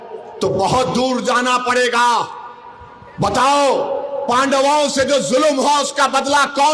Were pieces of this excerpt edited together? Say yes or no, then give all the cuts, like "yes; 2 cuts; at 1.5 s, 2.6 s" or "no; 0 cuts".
no; 0 cuts